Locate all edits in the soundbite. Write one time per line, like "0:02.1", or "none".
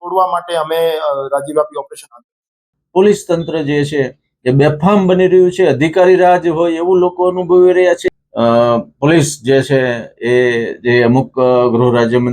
0:02.7
0:08.1